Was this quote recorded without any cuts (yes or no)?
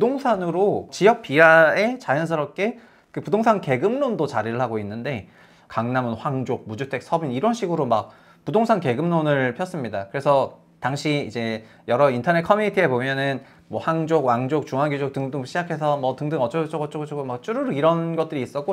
no